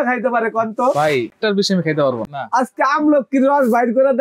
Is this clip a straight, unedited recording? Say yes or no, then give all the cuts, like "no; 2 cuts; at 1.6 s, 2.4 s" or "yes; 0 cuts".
no; 2 cuts; at 1.3 s, 2.2 s